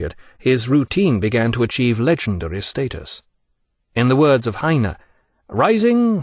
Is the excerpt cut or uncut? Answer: uncut